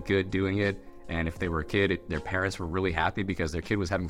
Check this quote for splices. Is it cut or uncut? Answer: uncut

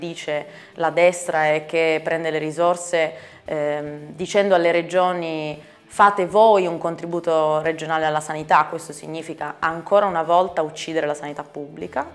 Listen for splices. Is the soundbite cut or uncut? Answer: uncut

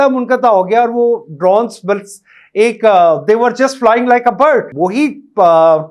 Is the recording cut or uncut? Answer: cut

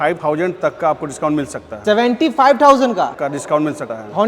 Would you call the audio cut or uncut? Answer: uncut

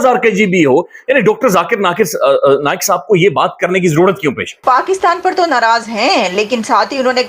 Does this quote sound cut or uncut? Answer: cut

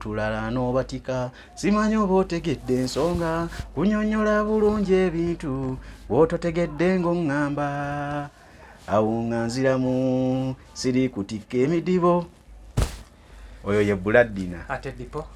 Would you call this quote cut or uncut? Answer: uncut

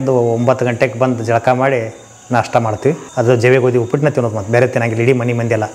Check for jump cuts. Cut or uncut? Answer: cut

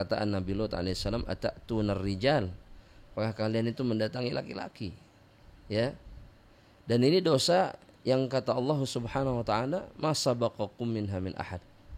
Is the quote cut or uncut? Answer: uncut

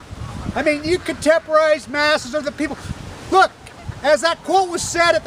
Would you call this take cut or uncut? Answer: uncut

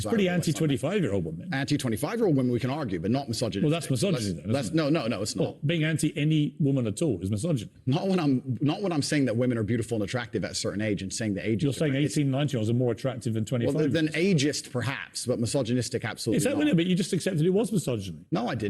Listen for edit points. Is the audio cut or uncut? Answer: cut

